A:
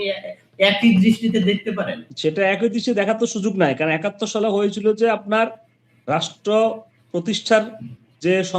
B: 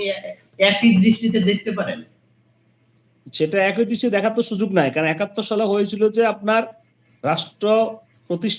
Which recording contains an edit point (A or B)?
A